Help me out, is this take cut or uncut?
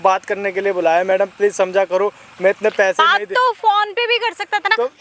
uncut